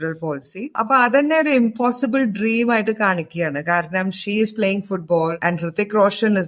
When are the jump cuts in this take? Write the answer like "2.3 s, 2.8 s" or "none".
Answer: 0.7 s, 5.4 s